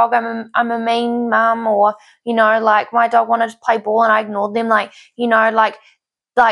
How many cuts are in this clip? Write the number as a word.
zero